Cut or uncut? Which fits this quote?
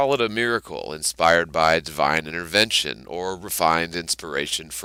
uncut